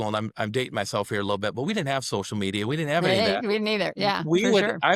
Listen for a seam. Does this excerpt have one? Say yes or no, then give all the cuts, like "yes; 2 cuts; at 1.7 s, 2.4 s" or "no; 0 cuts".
no; 0 cuts